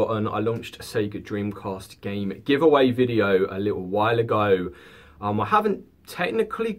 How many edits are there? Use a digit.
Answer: 0